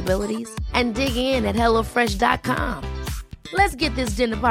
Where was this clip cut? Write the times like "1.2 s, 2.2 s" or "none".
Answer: none